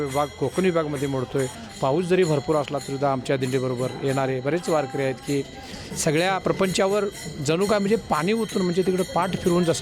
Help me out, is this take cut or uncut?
uncut